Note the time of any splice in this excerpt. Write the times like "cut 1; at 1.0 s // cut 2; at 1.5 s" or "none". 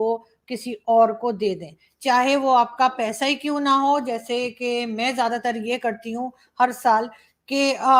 none